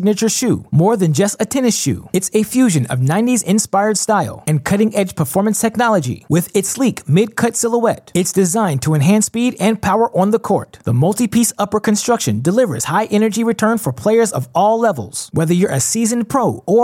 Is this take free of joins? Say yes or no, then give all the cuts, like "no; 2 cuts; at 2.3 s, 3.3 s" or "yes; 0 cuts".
yes; 0 cuts